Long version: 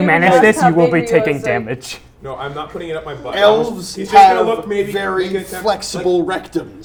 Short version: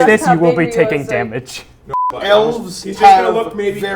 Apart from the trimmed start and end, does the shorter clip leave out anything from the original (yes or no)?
yes